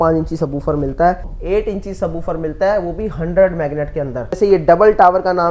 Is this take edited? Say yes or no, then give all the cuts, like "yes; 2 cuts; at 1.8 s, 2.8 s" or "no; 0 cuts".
yes; 2 cuts; at 1.3 s, 4.3 s